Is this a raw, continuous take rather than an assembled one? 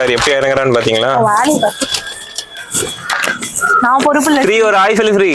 yes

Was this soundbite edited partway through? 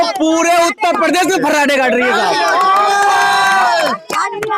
no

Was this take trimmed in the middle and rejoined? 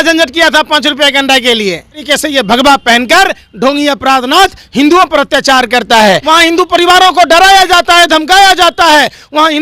yes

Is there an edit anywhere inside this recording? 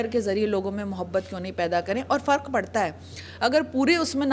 no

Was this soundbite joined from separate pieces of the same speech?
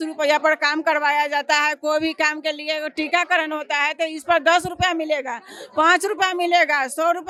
no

